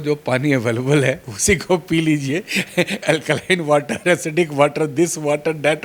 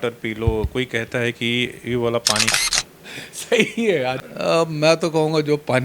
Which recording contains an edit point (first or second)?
second